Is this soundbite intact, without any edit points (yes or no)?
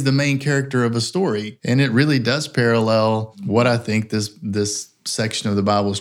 no